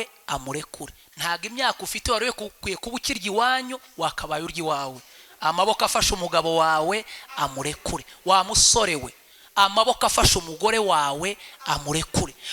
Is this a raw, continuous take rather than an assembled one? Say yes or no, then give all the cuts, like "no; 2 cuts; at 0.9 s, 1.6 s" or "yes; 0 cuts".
yes; 0 cuts